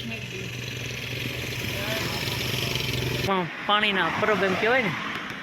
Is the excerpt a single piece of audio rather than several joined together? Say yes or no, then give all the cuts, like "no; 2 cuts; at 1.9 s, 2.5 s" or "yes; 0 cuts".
no; 1 cut; at 3.2 s